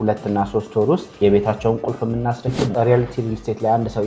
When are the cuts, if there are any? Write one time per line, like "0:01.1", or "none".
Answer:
0:01.1
0:02.6